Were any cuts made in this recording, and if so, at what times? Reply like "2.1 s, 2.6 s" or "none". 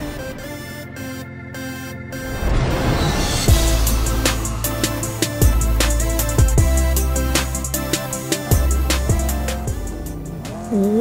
none